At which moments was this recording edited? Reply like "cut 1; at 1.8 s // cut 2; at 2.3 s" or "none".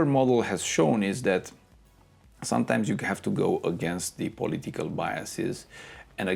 none